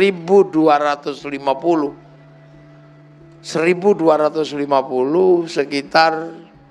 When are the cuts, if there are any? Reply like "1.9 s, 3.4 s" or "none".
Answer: 2.1 s, 3.5 s